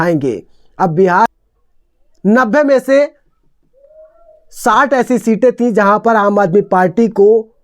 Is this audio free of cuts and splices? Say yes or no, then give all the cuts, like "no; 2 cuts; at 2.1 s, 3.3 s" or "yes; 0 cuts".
no; 1 cut; at 1.3 s